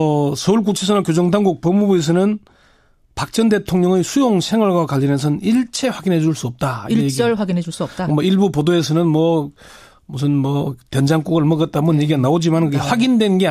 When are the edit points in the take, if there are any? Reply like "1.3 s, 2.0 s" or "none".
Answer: 9.2 s